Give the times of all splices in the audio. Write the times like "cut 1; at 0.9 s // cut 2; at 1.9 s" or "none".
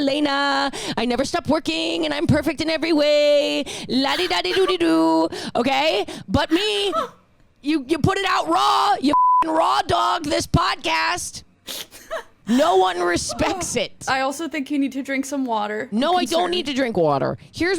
cut 1; at 12.0 s // cut 2; at 14.0 s